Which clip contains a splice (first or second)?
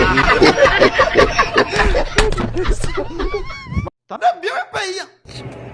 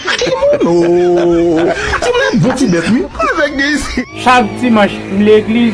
first